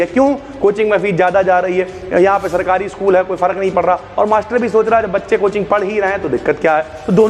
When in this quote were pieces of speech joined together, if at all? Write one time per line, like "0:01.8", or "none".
none